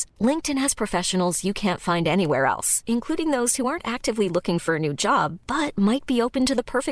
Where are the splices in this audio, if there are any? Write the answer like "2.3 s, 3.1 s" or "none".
none